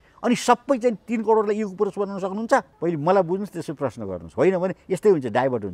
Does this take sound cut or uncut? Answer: cut